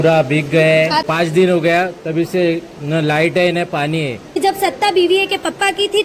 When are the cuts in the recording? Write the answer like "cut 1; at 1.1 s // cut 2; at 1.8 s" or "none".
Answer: cut 1; at 1.0 s // cut 2; at 4.4 s

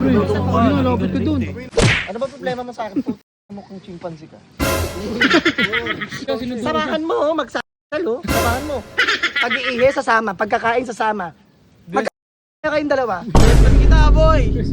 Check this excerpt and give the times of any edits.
cut 1; at 1.6 s // cut 2; at 6.2 s

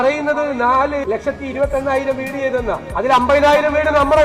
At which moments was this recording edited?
cut 1; at 1.0 s // cut 2; at 2.9 s

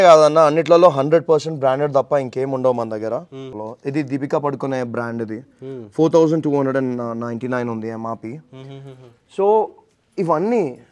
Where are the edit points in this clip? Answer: cut 1; at 3.6 s

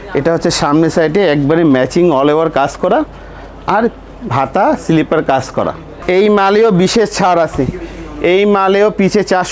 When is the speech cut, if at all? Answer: cut 1; at 5.9 s

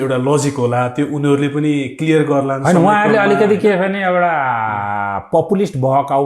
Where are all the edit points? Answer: none

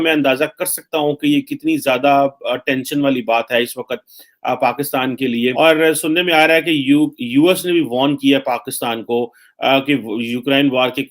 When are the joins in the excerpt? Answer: cut 1; at 5.5 s

